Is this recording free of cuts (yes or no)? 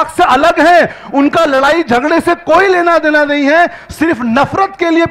yes